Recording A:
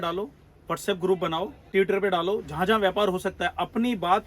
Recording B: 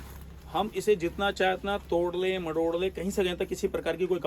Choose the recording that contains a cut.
A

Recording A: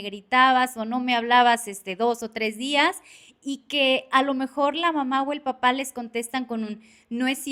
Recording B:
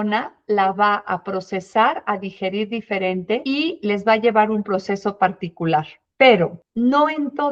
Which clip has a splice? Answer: B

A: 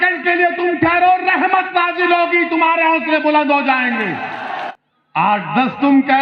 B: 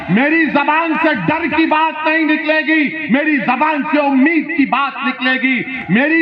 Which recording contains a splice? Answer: A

